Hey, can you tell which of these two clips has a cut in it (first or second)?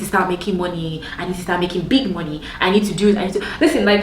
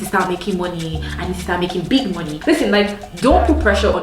second